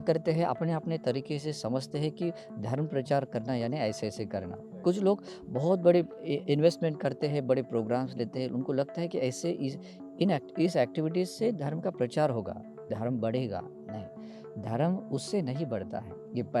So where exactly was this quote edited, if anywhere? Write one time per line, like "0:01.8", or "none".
none